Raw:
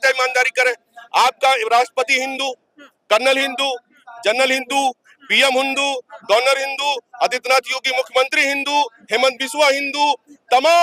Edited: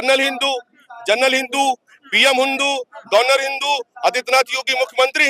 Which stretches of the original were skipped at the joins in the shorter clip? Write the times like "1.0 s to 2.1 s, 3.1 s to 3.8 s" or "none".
none